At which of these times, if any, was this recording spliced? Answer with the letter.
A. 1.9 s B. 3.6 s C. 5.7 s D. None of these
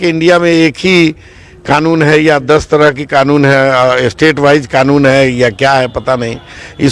D